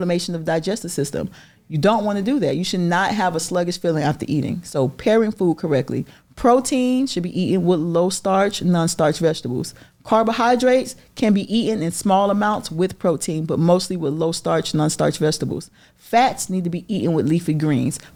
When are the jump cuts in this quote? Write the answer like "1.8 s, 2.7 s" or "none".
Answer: none